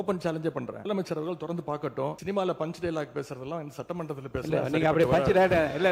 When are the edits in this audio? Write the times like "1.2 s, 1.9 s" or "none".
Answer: 0.8 s, 2.2 s